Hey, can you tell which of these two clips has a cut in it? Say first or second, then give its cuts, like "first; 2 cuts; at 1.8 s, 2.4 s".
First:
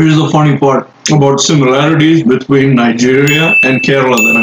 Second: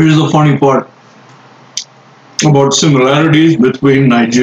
first; 1 cut; at 0.9 s